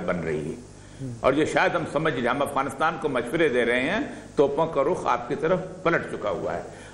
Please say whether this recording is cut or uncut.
uncut